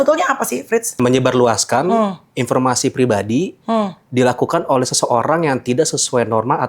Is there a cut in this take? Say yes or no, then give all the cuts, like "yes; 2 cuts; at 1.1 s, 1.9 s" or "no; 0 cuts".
yes; 1 cut; at 1.0 s